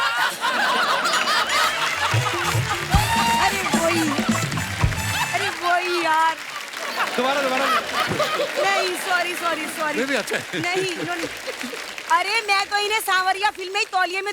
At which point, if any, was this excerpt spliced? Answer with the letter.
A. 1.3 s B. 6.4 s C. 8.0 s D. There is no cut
D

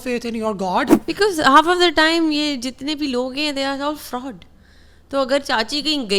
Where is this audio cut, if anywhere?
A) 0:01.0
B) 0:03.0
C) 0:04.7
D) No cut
A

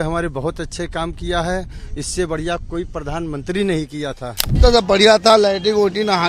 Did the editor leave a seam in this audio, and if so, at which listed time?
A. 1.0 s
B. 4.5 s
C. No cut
B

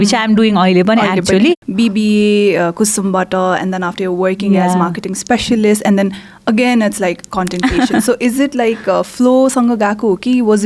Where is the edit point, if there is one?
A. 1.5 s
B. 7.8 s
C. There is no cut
A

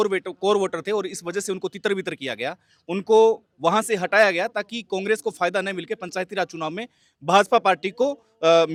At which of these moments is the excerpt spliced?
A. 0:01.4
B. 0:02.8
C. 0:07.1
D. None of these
D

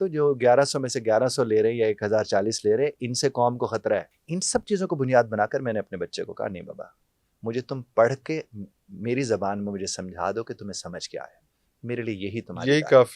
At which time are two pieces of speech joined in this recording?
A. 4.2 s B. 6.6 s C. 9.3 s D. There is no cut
A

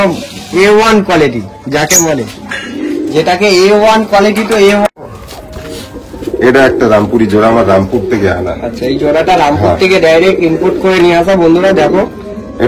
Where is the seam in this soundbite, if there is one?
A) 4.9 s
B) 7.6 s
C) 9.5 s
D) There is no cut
A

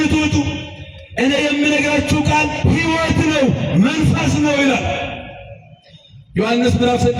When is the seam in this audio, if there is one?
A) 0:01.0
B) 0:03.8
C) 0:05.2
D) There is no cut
D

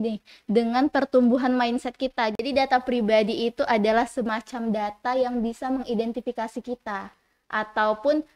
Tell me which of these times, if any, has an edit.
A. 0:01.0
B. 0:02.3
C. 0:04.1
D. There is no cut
B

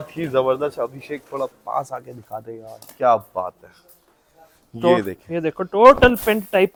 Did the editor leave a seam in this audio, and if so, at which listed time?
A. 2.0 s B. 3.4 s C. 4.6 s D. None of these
D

